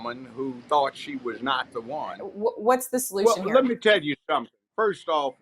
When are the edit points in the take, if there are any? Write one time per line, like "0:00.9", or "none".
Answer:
0:02.3